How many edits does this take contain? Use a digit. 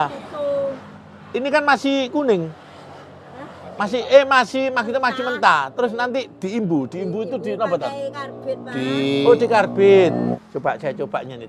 1